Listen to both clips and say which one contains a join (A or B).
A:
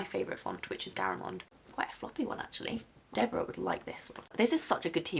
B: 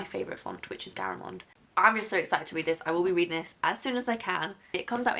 A